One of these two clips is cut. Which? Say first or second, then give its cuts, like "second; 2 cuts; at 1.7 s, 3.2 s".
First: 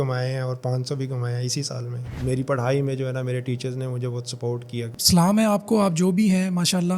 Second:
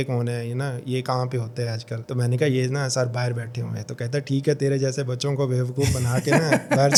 first; 2 cuts; at 2.2 s, 4.9 s